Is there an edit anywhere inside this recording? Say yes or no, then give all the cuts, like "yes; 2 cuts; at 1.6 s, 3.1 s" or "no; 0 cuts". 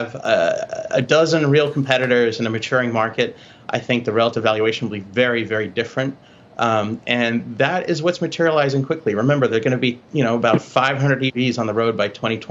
no; 0 cuts